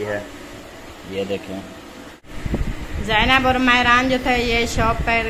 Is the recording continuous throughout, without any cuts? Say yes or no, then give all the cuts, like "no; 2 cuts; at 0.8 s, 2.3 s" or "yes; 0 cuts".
no; 1 cut; at 2.3 s